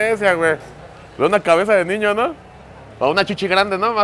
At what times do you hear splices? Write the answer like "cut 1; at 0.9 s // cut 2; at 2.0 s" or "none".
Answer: none